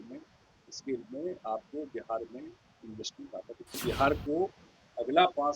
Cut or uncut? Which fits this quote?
cut